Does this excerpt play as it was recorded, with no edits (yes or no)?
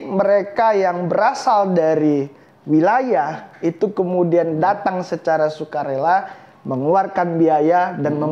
yes